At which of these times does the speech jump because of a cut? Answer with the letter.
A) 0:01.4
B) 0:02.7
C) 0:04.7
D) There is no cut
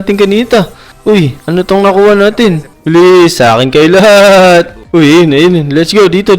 B